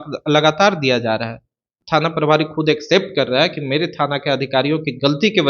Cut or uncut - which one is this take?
cut